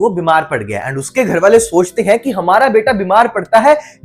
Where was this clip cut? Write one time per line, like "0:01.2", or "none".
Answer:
none